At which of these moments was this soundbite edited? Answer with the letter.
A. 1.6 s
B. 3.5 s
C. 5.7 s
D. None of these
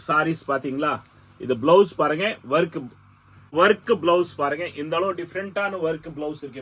B